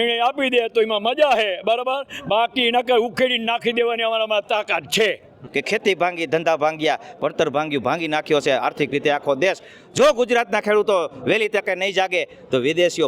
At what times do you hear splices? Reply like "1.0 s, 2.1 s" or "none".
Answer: 5.4 s